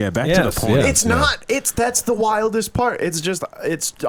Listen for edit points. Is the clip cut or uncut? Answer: uncut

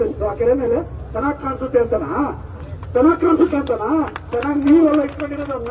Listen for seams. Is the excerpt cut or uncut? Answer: uncut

